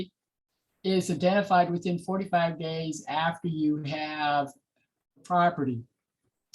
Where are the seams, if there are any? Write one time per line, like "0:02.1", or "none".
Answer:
0:05.1